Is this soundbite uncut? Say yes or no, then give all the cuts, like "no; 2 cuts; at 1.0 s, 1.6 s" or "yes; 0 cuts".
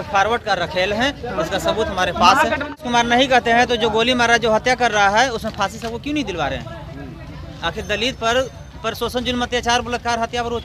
no; 1 cut; at 2.8 s